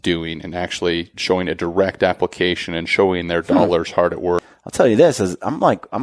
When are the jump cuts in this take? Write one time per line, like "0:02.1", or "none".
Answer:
0:04.6